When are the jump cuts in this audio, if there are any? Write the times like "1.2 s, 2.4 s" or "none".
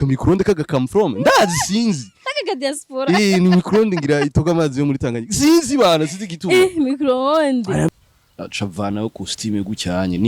7.9 s